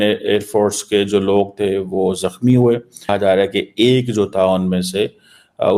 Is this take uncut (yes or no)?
no